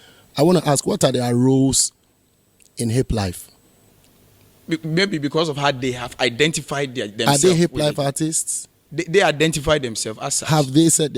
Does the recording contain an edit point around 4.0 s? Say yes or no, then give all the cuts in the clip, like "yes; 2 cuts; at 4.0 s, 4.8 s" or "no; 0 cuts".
no; 0 cuts